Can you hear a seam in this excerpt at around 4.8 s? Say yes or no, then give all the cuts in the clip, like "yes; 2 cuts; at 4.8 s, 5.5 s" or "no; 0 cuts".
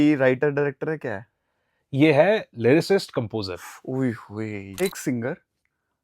yes; 1 cut; at 4.8 s